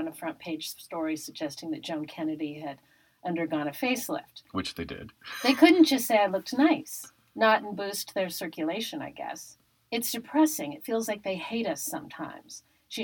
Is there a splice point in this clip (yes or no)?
no